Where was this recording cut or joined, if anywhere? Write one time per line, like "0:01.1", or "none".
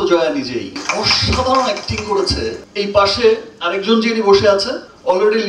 none